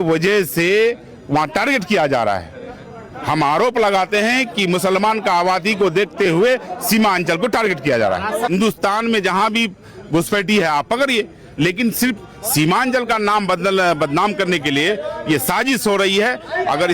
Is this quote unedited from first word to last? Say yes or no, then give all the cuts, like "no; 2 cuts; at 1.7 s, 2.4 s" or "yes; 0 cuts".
no; 1 cut; at 8.5 s